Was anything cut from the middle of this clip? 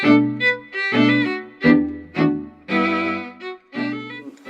yes; 1 cut; at 2.0 s

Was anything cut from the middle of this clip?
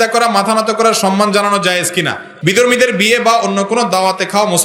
yes; 1 cut; at 2.3 s

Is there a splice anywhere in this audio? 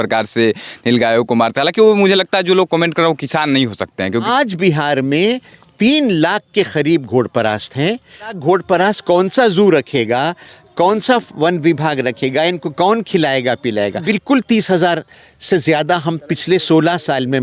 yes; 3 cuts; at 4.3 s, 8.3 s, 14.0 s

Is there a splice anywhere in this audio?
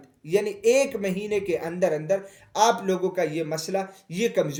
no; 0 cuts

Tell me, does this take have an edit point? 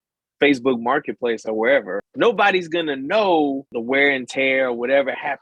yes; 2 cuts; at 2.0 s, 3.7 s

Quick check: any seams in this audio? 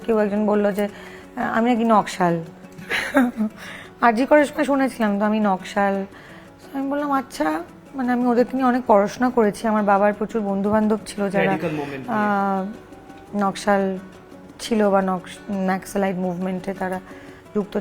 no; 0 cuts

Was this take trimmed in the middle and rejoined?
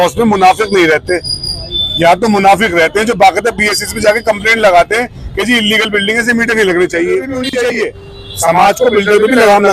yes; 1 cut; at 7.4 s

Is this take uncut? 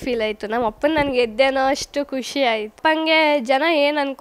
no; 1 cut; at 2.7 s

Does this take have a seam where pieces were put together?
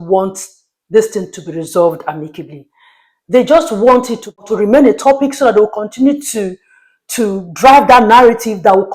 yes; 1 cut; at 4.5 s

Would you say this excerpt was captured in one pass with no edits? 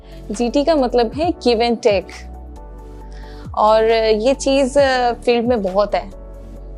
yes; 0 cuts

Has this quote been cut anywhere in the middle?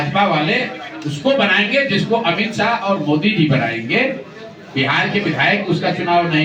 no; 0 cuts

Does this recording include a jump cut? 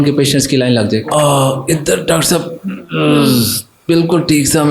yes; 1 cut; at 1.1 s

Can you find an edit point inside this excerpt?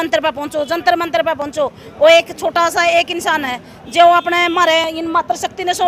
no; 0 cuts

